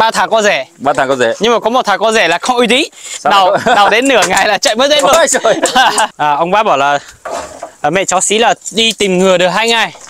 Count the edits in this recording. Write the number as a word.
one